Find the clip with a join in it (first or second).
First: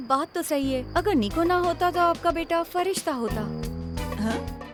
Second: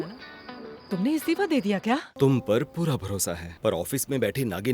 second